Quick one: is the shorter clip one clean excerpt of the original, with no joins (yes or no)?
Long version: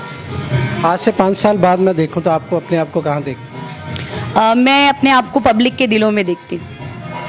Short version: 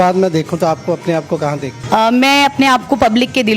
no